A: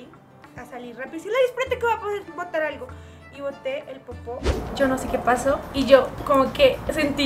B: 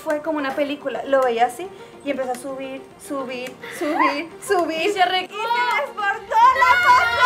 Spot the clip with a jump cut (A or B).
A